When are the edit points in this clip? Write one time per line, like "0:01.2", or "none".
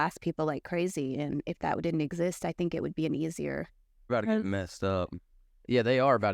0:04.1